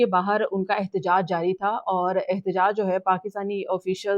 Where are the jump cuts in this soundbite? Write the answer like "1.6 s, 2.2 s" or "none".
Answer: none